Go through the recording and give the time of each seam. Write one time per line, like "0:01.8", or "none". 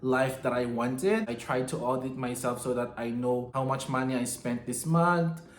0:01.3
0:03.5

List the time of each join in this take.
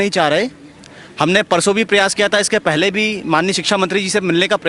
none

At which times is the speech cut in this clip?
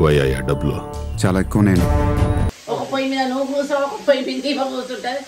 0:02.5

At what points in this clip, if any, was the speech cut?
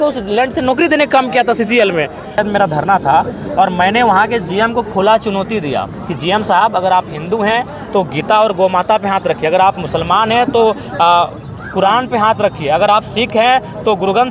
0:02.3

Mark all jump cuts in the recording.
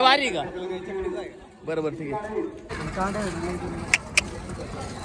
0:02.7

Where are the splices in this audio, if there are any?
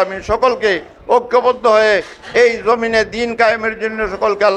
none

